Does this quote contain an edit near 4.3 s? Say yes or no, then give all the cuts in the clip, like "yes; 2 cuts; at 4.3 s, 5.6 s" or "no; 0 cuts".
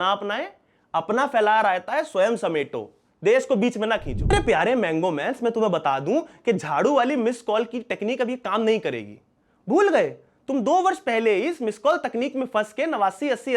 yes; 1 cut; at 4.3 s